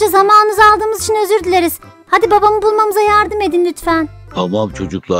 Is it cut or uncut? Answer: cut